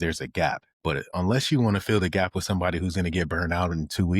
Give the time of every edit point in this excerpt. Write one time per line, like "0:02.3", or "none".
0:01.0